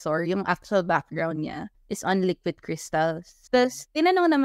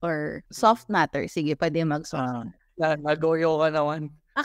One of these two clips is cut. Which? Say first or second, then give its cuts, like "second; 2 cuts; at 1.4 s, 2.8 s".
first; 1 cut; at 3.3 s